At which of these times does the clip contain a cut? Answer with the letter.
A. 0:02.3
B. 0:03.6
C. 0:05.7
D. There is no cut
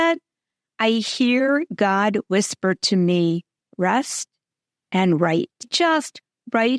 C